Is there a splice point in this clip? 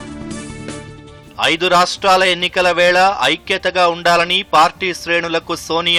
no; 0 cuts

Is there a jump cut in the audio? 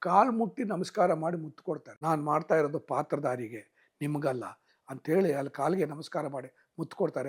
yes; 1 cut; at 1.9 s

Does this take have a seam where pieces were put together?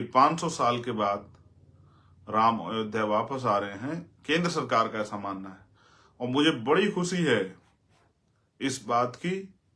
no; 0 cuts

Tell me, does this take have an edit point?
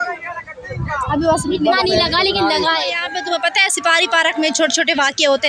yes; 1 cut; at 3.1 s

